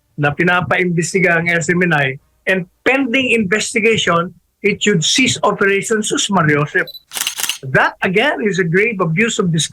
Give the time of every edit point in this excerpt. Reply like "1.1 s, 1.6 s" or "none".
7.2 s